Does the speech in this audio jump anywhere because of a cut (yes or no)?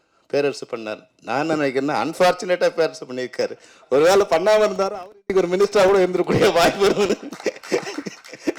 no